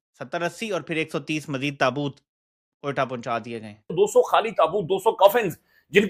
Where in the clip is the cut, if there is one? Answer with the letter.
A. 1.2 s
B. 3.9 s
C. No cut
B